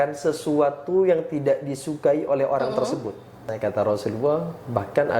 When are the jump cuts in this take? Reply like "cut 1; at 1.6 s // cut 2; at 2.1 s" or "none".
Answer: cut 1; at 3.5 s